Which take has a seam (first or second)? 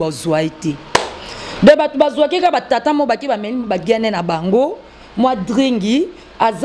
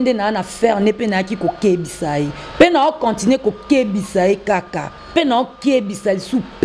second